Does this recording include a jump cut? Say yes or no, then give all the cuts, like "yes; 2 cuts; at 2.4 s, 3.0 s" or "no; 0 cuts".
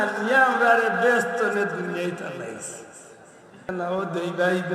yes; 1 cut; at 3.7 s